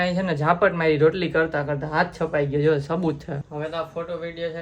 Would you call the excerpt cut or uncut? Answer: cut